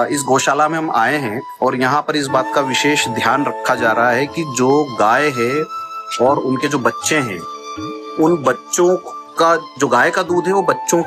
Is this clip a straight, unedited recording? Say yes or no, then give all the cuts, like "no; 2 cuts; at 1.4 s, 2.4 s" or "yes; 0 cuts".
yes; 0 cuts